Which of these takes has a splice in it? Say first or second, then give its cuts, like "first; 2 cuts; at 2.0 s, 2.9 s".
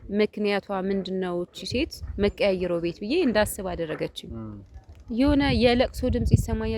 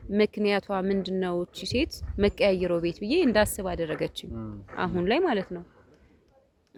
first; 1 cut; at 4.6 s